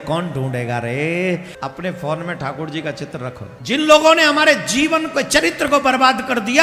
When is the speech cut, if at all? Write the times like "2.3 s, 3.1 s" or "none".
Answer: 1.5 s, 3.5 s

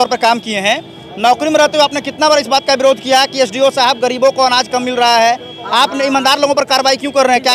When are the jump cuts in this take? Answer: none

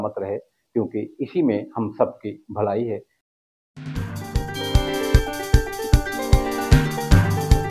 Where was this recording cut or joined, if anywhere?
3.1 s

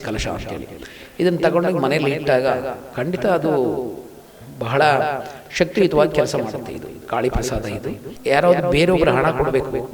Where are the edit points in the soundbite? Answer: 8.2 s

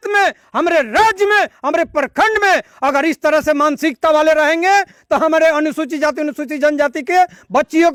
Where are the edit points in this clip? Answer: none

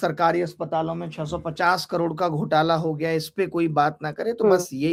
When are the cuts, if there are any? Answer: none

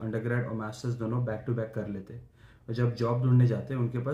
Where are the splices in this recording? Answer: none

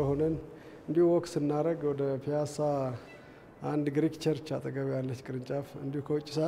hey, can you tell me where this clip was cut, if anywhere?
none

